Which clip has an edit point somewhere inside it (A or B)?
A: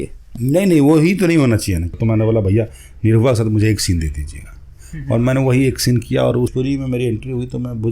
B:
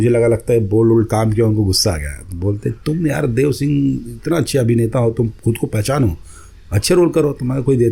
A